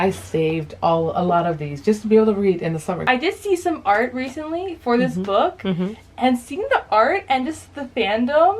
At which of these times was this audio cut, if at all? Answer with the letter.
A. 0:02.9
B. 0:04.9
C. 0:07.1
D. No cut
A